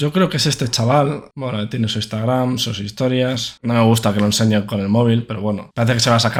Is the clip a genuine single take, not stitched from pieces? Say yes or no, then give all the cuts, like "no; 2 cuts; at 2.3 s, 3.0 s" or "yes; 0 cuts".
yes; 0 cuts